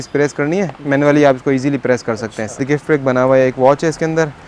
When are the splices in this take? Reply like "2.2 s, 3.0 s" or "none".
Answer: 2.6 s